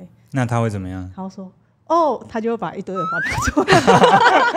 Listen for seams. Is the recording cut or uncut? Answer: uncut